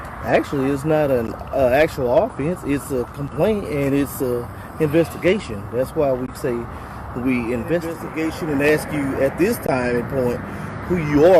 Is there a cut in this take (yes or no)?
yes